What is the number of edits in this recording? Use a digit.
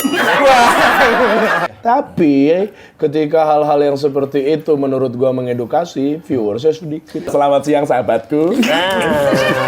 2